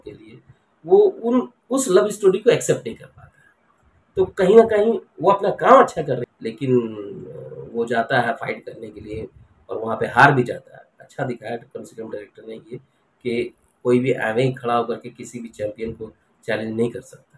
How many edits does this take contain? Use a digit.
1